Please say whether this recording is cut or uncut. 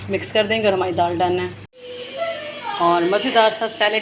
uncut